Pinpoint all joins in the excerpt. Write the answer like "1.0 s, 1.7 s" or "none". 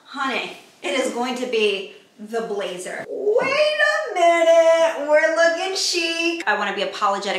2.9 s, 6.4 s